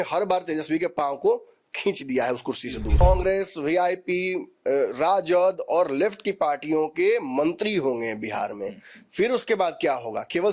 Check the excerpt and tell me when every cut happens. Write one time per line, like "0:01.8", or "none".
0:03.0